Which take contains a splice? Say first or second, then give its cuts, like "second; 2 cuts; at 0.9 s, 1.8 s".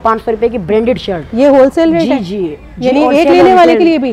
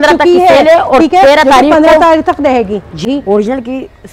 second; 1 cut; at 3.0 s